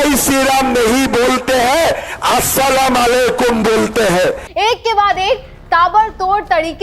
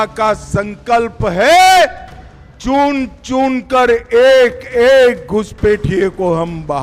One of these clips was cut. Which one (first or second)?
first